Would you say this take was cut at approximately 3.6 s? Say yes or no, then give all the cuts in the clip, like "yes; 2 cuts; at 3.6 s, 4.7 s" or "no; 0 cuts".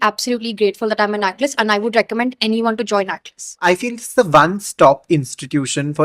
yes; 1 cut; at 3.6 s